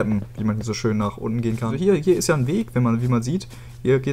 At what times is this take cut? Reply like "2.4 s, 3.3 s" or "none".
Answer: 1.7 s